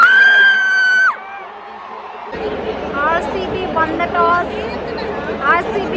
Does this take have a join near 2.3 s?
yes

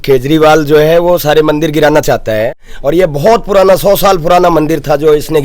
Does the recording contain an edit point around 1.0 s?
no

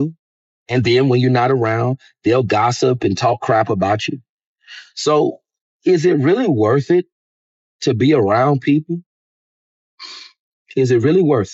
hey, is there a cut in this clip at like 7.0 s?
no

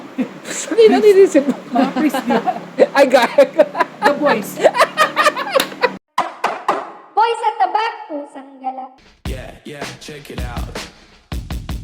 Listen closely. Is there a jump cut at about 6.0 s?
yes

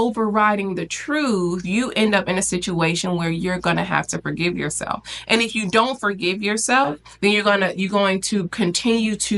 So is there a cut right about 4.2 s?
no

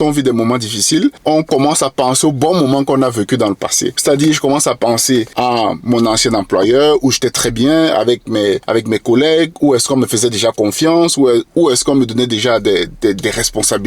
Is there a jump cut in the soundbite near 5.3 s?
yes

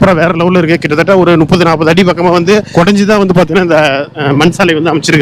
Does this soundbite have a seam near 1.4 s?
no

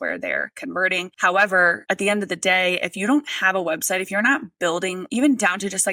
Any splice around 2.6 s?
no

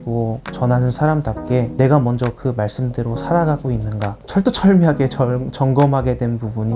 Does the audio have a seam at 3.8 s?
no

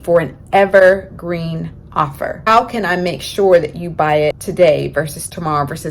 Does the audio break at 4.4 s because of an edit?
yes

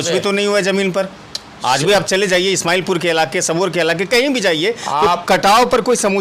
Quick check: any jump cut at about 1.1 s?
no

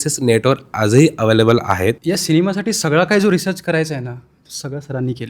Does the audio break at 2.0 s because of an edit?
yes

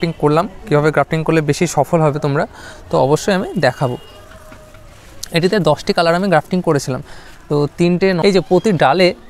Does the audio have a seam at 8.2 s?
yes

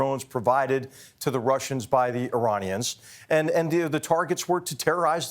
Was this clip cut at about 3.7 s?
yes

